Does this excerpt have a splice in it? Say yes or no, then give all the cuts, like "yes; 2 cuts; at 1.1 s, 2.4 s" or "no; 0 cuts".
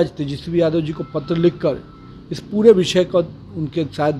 no; 0 cuts